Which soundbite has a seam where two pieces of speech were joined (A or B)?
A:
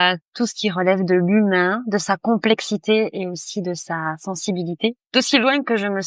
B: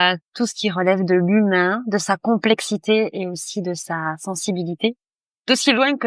A